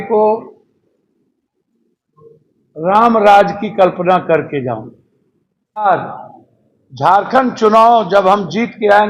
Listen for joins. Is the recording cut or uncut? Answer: cut